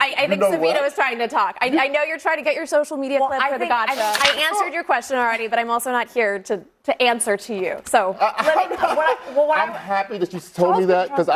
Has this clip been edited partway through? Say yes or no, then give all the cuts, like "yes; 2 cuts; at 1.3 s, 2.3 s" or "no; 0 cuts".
yes; 1 cut; at 4.2 s